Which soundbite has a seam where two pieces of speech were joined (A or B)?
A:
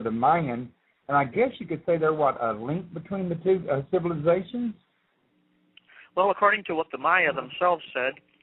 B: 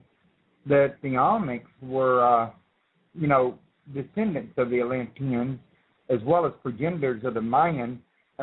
B